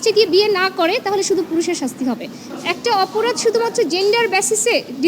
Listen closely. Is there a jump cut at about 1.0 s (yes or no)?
no